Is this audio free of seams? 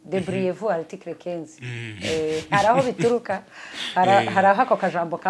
yes; 0 cuts

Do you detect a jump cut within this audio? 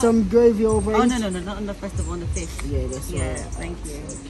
no; 0 cuts

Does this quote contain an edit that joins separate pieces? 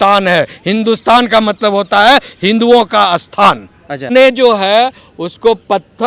yes; 1 cut; at 4.0 s

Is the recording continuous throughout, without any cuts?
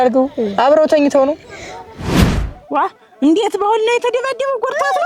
no; 1 cut; at 2.2 s

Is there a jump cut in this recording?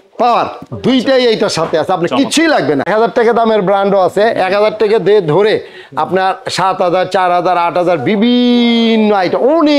yes; 1 cut; at 2.9 s

